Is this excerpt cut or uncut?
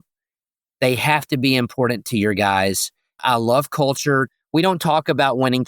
cut